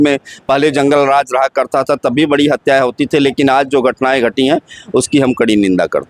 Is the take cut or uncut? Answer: uncut